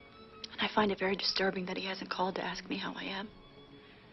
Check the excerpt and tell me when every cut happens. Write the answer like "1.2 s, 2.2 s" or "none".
none